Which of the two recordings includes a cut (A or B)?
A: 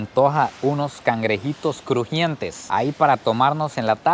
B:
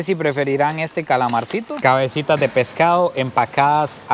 B